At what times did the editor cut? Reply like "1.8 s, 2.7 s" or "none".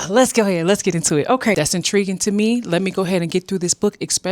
1.5 s